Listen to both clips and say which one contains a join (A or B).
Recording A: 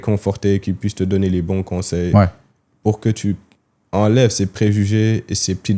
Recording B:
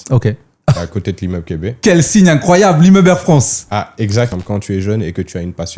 B